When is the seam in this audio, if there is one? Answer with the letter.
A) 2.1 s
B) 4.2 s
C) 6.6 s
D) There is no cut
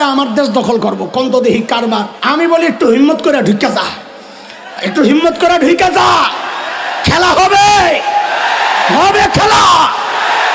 A